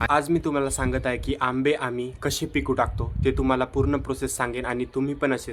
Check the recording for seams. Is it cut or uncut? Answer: uncut